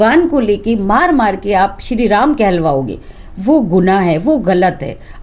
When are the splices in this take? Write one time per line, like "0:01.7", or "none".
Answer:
none